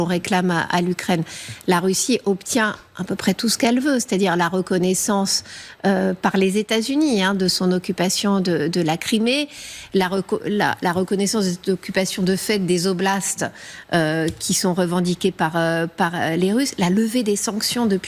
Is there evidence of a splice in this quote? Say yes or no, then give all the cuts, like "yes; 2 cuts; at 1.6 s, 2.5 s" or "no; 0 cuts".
no; 0 cuts